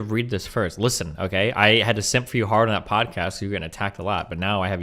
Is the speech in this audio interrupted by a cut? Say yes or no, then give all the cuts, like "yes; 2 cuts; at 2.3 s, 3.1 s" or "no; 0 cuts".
no; 0 cuts